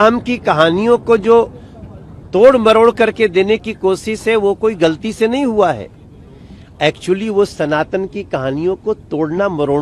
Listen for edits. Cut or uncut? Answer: uncut